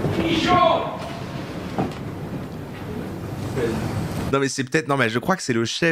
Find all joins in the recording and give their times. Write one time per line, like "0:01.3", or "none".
none

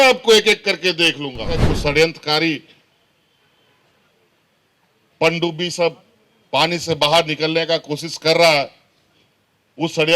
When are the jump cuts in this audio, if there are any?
0:01.7

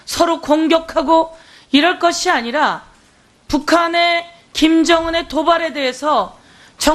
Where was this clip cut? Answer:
none

